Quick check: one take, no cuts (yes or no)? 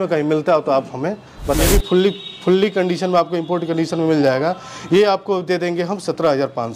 no